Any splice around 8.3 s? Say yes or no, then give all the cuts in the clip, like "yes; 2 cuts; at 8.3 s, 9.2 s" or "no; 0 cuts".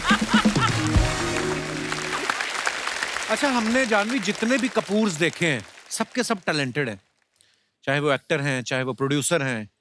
no; 2 cuts; at 2.0 s, 3.2 s